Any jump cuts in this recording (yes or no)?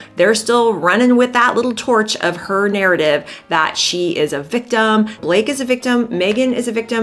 yes